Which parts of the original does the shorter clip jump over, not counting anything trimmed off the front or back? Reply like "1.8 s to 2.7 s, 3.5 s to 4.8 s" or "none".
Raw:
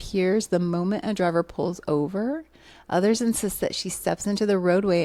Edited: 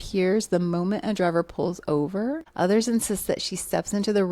2.5 s to 2.8 s